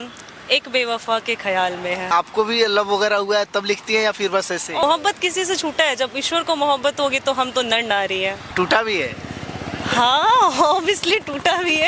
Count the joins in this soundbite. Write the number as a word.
three